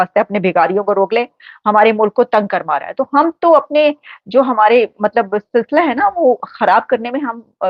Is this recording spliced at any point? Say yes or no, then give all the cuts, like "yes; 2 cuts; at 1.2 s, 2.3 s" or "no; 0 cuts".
no; 0 cuts